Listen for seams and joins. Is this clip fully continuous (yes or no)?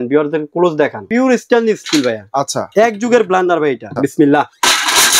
no